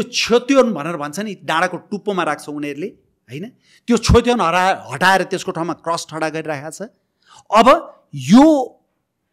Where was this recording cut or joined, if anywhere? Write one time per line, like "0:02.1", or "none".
none